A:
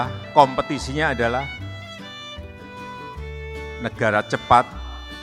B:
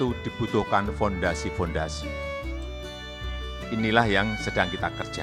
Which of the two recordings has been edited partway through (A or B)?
B